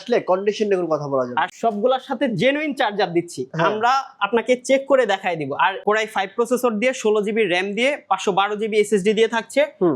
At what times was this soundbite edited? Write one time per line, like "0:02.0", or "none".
0:01.5
0:05.8